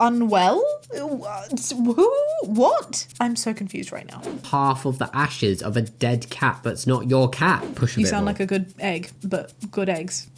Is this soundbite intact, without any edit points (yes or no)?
no